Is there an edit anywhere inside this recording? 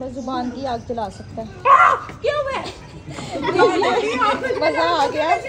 no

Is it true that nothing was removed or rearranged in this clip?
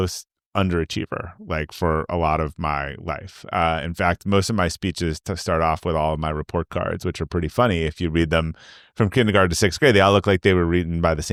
yes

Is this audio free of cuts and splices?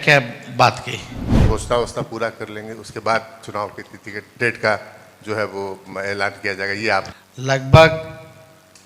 no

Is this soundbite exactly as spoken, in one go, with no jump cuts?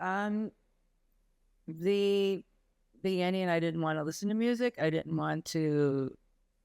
yes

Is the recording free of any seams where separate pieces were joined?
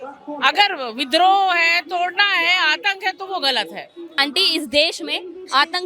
no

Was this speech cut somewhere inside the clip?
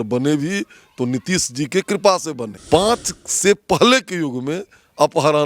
yes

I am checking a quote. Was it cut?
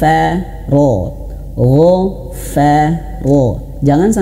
no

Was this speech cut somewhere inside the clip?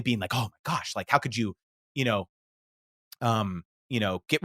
no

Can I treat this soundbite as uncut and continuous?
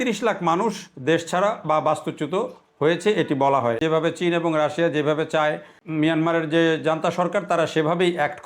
no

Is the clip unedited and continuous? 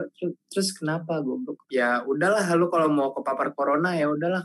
no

